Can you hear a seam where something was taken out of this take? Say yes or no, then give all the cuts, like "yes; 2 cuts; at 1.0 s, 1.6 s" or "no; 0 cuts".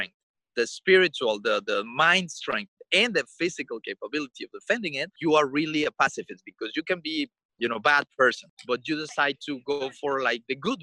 yes; 3 cuts; at 5.1 s, 7.4 s, 8.5 s